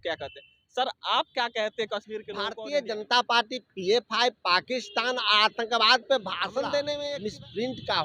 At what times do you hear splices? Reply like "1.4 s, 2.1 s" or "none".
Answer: 2.5 s, 7.1 s

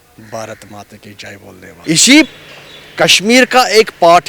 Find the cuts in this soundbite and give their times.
1.8 s

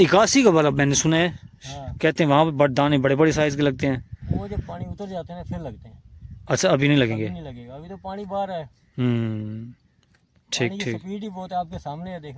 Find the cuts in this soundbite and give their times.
none

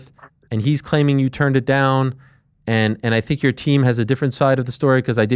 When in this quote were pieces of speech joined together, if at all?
none

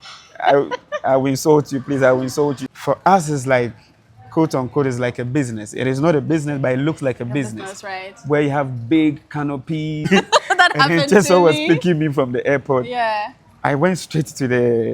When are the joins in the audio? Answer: 2.6 s, 10.1 s

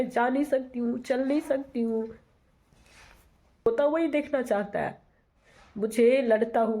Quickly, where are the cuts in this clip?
3.7 s

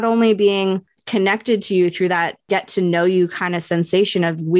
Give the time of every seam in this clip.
0.9 s, 2.4 s

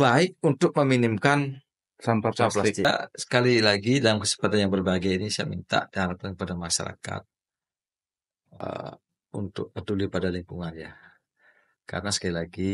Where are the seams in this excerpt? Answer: 2.8 s

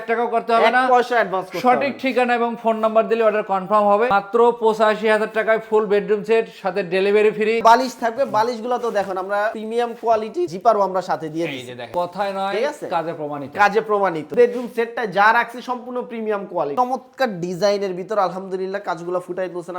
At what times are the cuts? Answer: 4.1 s, 7.6 s, 11.9 s, 14.3 s, 16.7 s

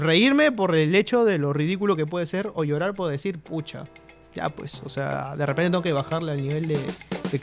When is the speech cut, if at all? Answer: none

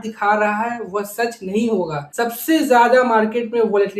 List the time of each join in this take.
2.1 s

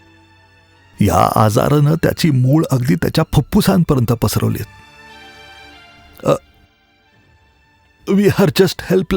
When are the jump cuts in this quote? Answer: 0.9 s

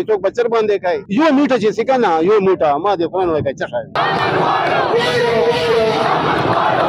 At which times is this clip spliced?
1.0 s

